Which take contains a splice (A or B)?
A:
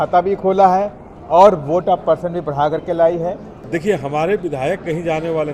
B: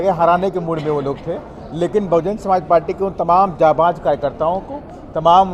A